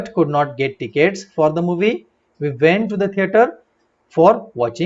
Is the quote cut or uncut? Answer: uncut